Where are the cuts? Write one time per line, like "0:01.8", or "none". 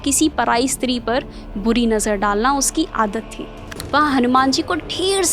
0:03.8